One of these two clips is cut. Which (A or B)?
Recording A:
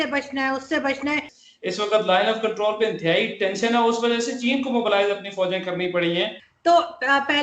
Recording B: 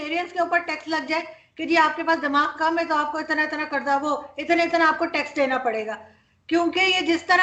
A